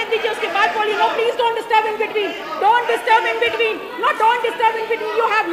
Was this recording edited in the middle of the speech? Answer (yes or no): no